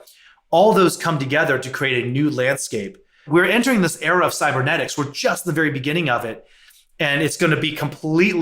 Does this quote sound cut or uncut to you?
cut